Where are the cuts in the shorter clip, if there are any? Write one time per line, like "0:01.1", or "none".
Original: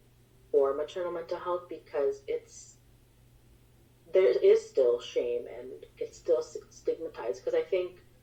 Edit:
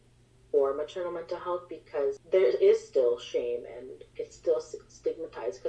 0:02.2